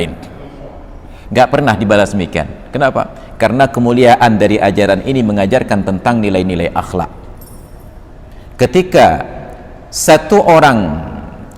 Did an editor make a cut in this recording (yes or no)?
no